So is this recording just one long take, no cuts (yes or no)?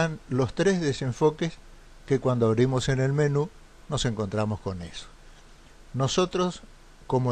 yes